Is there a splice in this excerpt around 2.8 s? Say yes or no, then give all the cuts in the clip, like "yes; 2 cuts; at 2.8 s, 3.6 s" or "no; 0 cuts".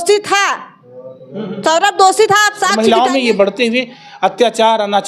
yes; 1 cut; at 2.8 s